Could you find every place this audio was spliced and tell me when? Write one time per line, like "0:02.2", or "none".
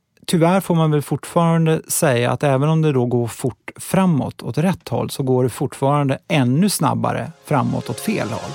none